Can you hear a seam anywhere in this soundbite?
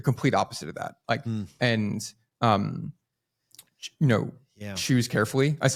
no; 0 cuts

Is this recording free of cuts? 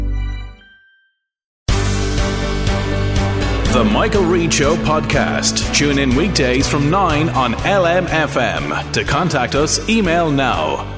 no; 1 cut; at 1.6 s

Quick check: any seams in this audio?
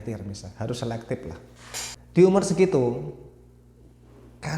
yes; 1 cut; at 2.2 s

